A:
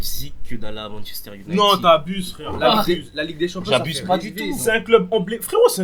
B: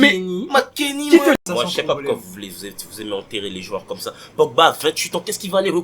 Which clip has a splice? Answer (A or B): B